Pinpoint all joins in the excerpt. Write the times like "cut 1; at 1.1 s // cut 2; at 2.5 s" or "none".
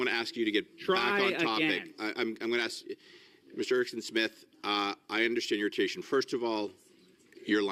none